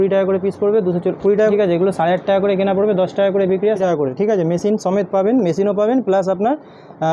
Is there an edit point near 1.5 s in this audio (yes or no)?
yes